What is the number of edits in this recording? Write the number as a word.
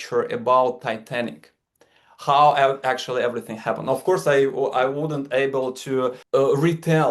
one